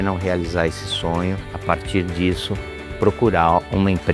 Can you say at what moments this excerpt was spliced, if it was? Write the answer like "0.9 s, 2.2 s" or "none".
1.5 s